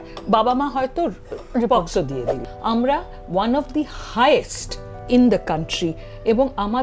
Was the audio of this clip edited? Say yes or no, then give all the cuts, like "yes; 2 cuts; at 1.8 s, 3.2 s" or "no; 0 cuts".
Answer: yes; 1 cut; at 2.4 s